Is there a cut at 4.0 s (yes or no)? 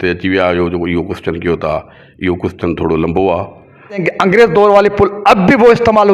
yes